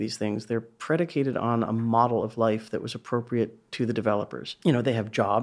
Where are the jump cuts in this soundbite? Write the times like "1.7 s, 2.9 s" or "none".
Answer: 4.4 s